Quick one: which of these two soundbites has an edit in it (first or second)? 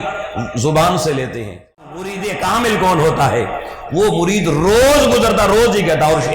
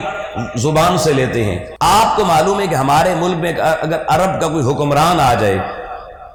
first